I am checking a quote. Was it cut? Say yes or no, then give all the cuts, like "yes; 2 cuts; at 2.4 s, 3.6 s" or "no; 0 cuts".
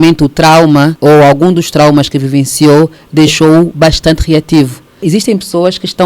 yes; 2 cuts; at 0.9 s, 5.0 s